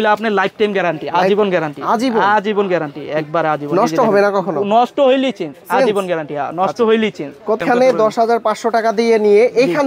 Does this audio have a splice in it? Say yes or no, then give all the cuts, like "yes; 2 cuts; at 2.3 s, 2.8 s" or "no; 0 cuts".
yes; 1 cut; at 7.6 s